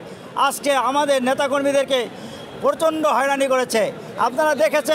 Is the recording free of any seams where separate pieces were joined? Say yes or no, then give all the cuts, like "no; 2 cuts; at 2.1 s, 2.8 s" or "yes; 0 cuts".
yes; 0 cuts